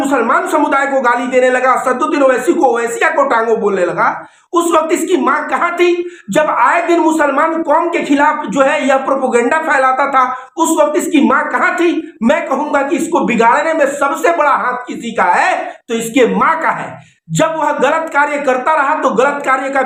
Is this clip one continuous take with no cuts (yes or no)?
yes